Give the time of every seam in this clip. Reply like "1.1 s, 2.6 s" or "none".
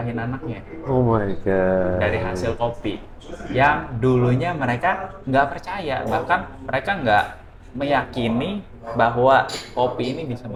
none